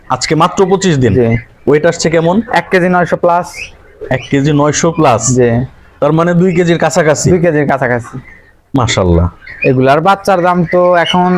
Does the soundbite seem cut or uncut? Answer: cut